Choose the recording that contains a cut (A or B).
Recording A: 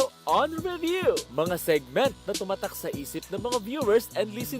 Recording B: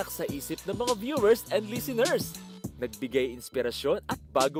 A